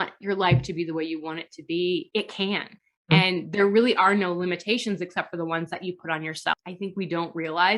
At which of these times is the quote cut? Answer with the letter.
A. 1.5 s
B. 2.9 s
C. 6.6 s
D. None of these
C